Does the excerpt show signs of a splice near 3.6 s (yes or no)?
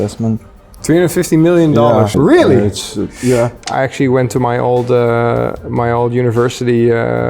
yes